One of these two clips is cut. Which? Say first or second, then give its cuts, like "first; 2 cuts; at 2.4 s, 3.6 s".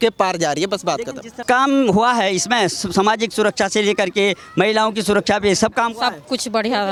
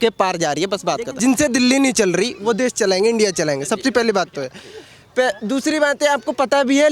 second; 1 cut; at 1.2 s